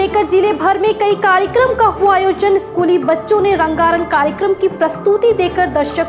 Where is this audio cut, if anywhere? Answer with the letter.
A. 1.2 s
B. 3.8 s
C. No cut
C